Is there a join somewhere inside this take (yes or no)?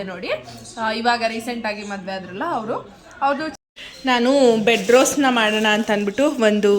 yes